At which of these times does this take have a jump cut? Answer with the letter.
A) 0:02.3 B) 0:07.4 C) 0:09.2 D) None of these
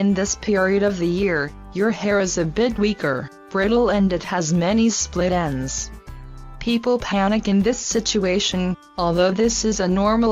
B